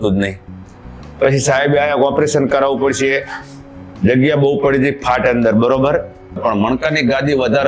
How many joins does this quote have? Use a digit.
1